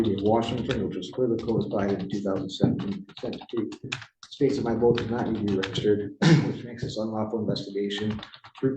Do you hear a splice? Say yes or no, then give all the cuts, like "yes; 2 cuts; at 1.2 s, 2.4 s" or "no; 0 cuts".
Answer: no; 0 cuts